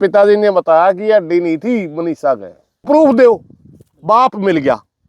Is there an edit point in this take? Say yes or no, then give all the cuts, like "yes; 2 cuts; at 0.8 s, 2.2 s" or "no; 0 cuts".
yes; 1 cut; at 2.8 s